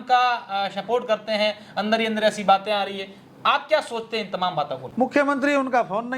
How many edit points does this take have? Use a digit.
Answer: 1